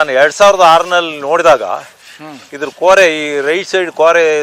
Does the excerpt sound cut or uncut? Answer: uncut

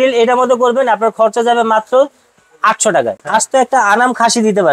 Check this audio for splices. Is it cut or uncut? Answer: cut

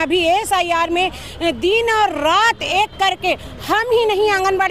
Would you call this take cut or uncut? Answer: uncut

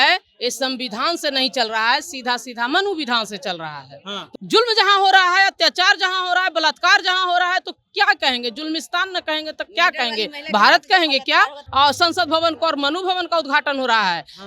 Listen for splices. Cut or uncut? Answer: cut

